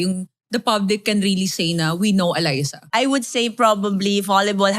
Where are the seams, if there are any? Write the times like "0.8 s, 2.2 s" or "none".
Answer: 2.8 s